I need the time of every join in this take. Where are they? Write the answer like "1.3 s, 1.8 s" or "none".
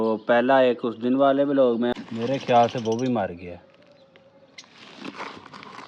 1.9 s